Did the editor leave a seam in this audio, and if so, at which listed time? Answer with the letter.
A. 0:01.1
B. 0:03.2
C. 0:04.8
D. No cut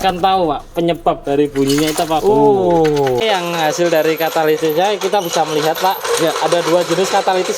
B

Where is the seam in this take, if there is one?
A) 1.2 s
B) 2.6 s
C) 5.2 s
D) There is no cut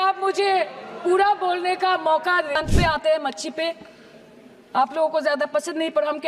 B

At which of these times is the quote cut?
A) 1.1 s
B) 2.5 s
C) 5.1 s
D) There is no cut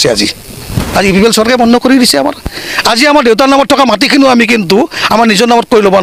D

